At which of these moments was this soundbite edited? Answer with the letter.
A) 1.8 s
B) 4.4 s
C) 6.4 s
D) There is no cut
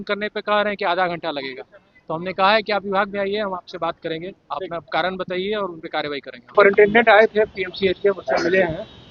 C